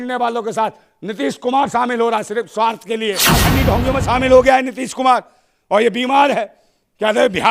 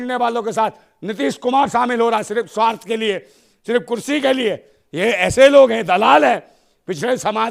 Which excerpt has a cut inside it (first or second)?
first